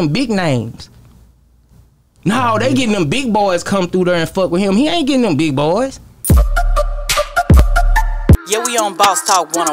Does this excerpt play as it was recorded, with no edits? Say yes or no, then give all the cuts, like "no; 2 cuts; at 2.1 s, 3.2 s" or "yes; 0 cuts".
no; 1 cut; at 6.1 s